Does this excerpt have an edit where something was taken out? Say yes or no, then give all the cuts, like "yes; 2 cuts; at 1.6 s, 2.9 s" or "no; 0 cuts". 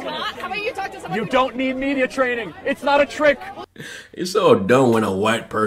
yes; 1 cut; at 3.5 s